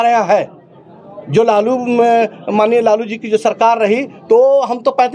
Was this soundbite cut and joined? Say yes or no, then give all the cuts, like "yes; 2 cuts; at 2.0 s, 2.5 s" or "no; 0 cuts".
no; 0 cuts